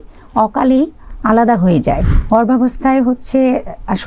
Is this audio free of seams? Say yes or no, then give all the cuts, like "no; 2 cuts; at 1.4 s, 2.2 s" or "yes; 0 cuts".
no; 1 cut; at 2.1 s